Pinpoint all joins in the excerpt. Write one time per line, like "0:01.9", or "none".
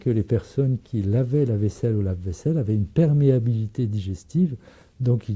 none

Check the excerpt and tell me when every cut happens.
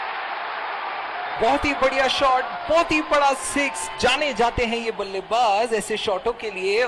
0:01.4

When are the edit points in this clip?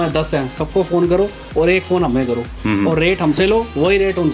none

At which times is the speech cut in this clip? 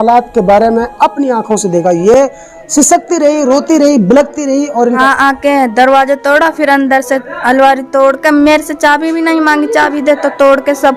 none

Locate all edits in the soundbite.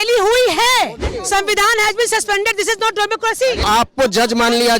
0:01.1
0:03.6

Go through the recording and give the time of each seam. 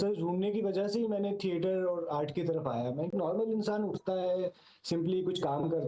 0:03.1

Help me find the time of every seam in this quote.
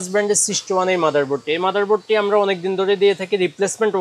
none

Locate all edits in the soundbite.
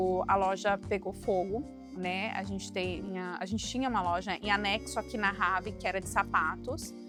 none

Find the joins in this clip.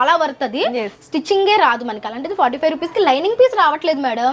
none

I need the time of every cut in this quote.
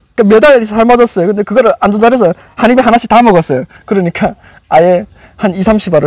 none

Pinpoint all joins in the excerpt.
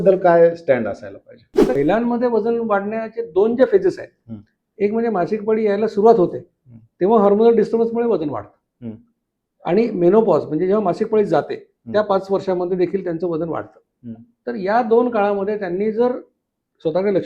0:01.8

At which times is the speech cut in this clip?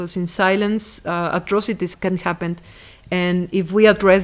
0:01.9

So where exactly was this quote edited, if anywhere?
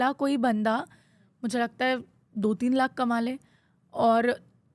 none

